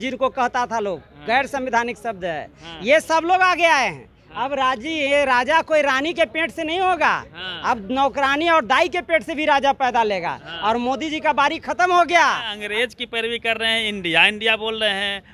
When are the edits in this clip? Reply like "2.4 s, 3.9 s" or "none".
12.6 s